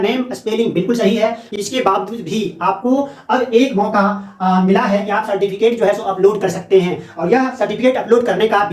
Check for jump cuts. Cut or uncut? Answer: cut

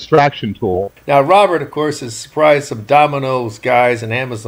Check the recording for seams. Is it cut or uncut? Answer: cut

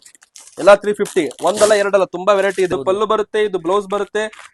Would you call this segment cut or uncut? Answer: cut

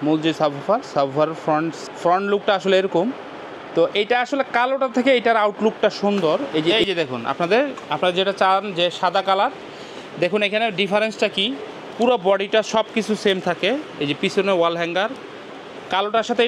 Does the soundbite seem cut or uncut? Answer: cut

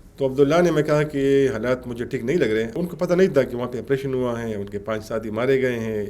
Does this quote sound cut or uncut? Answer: cut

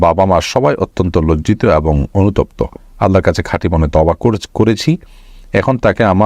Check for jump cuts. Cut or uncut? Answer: uncut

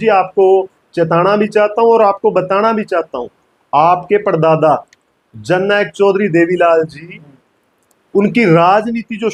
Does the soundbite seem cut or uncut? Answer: uncut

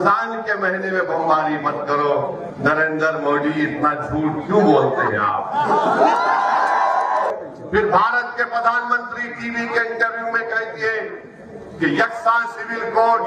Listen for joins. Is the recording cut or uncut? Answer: cut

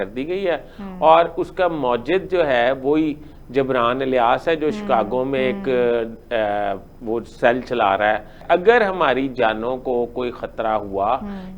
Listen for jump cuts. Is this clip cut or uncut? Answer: cut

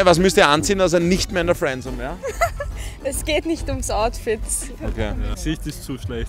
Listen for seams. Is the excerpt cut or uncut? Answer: uncut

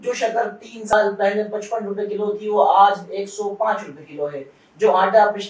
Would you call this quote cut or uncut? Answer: cut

